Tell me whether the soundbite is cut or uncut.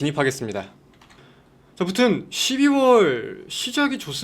cut